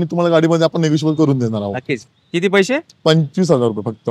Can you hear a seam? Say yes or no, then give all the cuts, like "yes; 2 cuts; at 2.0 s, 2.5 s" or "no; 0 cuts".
yes; 1 cut; at 2.0 s